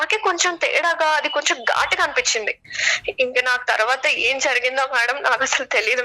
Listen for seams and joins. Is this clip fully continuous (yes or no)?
no